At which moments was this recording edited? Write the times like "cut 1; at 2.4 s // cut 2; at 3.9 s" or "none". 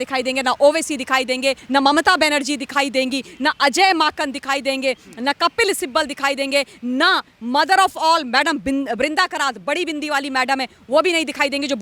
cut 1; at 1.6 s

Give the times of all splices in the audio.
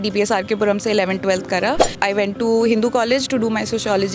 cut 1; at 1.9 s

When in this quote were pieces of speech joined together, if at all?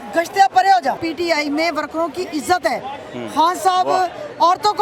cut 1; at 1.0 s

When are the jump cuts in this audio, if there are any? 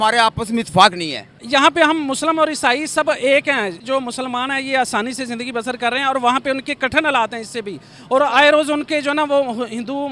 cut 1; at 1.4 s // cut 2; at 3.8 s

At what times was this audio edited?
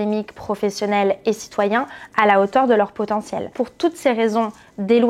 cut 1; at 3.4 s

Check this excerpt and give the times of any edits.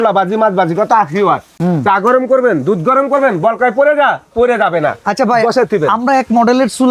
none

